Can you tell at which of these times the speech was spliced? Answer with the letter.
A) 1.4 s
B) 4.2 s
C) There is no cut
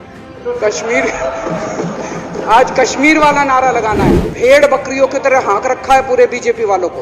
B